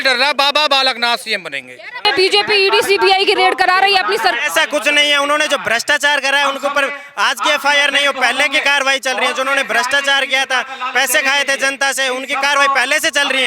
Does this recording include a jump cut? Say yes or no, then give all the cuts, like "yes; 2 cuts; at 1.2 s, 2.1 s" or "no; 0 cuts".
yes; 1 cut; at 2.0 s